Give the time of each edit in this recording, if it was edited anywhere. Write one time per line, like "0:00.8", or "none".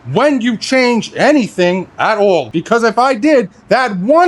0:02.5